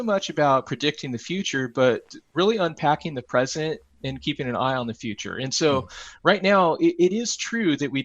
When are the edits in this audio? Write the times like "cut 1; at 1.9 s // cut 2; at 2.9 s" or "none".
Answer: none